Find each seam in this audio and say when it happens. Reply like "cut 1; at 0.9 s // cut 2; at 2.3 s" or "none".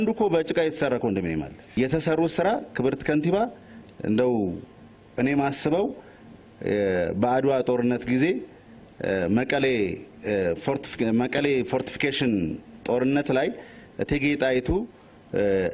cut 1; at 1.8 s